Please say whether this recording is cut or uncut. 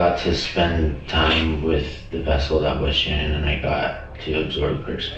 uncut